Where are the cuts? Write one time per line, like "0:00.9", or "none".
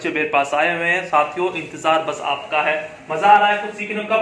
none